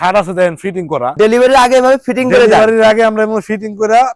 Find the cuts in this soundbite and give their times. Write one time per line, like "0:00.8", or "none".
none